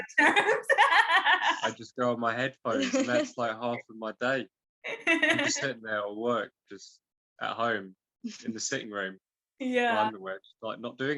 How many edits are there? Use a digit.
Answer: 0